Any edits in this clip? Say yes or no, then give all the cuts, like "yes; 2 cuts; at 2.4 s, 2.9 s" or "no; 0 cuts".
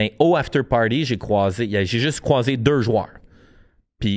no; 0 cuts